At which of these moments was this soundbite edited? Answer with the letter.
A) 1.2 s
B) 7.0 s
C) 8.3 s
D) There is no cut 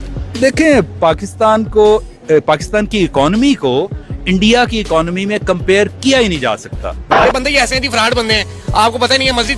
B